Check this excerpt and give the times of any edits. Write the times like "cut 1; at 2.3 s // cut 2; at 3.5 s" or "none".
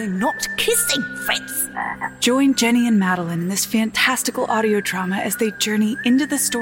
cut 1; at 2.2 s